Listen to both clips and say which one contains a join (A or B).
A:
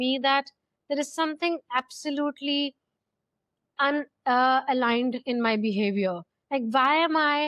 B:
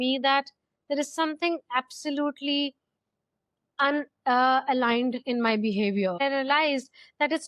B